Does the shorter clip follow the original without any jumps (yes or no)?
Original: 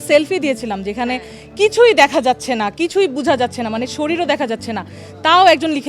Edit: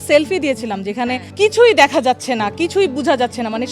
no